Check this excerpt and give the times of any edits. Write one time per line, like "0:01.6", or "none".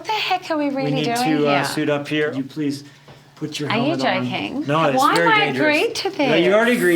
0:02.3